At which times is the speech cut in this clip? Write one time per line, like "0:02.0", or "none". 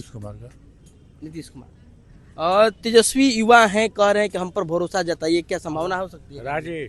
none